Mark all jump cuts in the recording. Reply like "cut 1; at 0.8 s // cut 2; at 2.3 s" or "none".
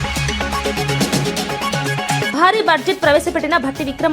none